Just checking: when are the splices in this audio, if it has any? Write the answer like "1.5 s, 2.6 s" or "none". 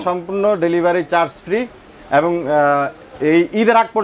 none